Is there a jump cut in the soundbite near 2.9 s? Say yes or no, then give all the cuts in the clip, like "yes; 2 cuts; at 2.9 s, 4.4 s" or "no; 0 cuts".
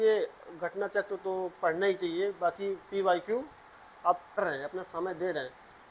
no; 1 cut; at 4.4 s